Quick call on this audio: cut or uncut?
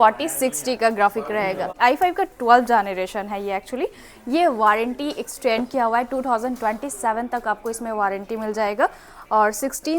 cut